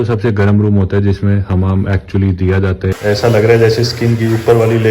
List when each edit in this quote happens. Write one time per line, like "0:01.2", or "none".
0:03.0